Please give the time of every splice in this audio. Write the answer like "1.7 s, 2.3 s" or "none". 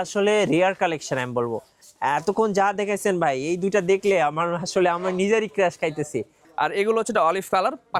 6.4 s